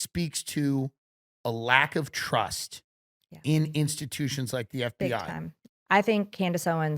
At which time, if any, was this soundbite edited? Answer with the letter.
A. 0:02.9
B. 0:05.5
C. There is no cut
B